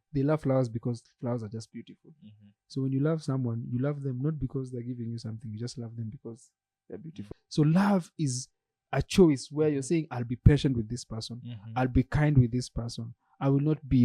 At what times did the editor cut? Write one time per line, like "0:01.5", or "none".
0:07.2